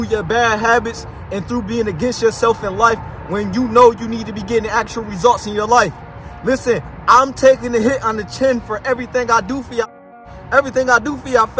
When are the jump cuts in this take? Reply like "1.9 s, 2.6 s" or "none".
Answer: 9.9 s

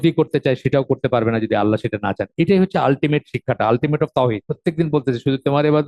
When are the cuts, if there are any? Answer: 4.5 s

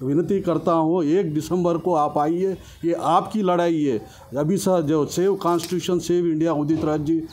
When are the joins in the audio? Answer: none

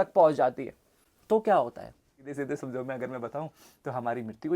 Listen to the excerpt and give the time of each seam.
2.3 s

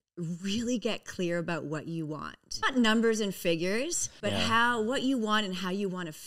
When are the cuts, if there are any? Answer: 2.4 s, 4.0 s

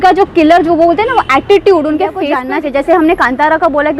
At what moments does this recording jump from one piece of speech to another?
2.3 s

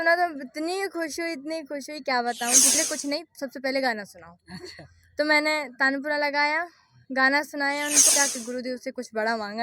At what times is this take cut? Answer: 2.8 s, 8.1 s

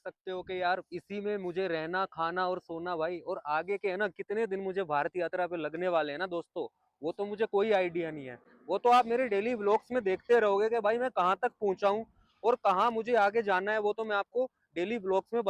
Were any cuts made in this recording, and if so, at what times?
none

